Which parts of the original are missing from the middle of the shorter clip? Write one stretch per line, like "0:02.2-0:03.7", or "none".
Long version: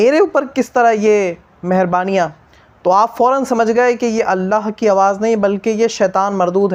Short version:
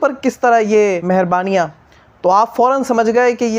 0:01.3-0:01.6